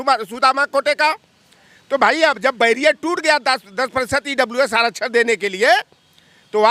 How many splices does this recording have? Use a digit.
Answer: 0